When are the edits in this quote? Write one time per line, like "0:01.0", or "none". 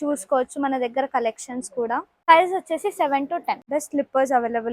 0:03.6